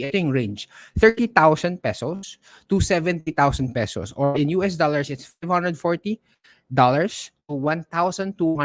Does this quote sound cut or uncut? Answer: uncut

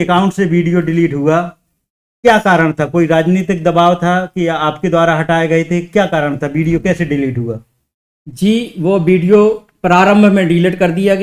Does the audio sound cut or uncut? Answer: uncut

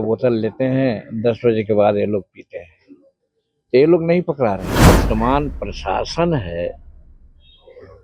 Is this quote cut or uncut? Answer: cut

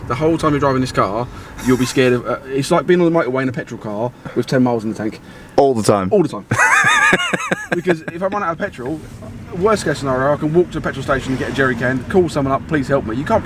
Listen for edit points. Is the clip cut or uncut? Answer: uncut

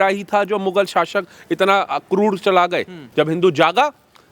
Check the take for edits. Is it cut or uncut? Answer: cut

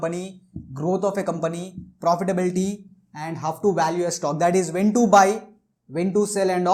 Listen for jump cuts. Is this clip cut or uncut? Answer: uncut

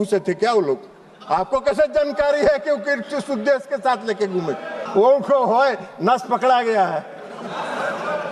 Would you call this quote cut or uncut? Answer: cut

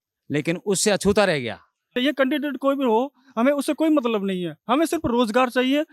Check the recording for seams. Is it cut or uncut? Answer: cut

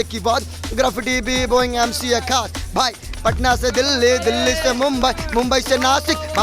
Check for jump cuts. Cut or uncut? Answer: uncut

